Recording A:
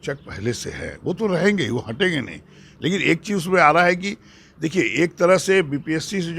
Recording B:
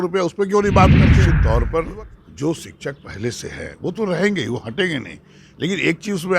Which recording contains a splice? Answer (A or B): B